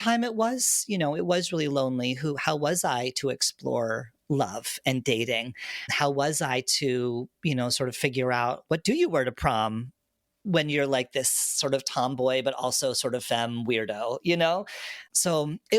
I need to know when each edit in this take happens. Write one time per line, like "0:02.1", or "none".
none